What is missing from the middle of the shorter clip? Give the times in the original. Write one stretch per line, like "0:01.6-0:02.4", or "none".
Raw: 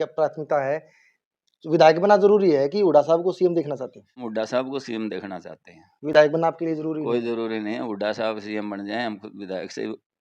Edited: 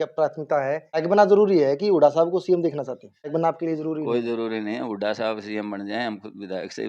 0:01.1-0:02.0
0:04.2-0:06.3